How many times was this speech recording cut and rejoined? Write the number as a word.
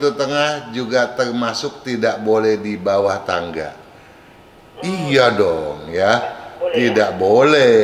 zero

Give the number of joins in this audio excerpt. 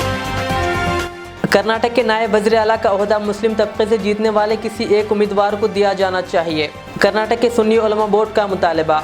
one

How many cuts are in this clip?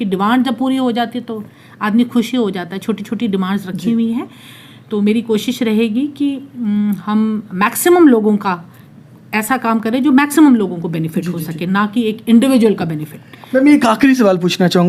zero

